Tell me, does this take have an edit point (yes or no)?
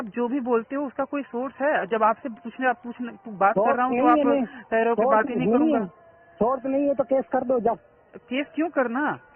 no